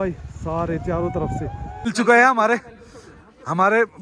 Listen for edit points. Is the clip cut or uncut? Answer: cut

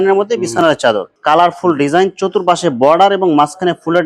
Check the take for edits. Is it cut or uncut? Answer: cut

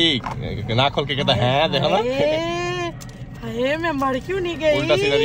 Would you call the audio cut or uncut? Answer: uncut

